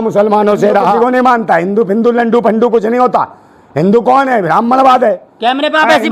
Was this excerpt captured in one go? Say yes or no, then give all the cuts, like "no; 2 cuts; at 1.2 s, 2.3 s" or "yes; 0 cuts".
no; 1 cut; at 1.0 s